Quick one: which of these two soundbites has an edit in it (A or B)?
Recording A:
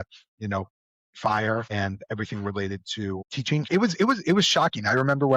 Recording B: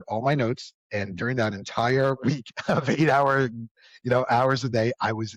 A